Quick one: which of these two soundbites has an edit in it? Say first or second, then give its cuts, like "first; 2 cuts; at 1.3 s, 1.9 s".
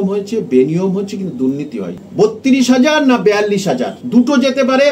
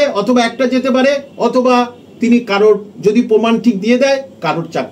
first; 2 cuts; at 2.0 s, 3.9 s